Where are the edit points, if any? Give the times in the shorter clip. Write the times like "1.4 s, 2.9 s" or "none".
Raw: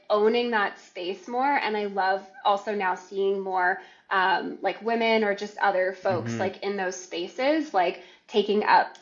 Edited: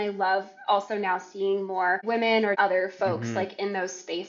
2.4 s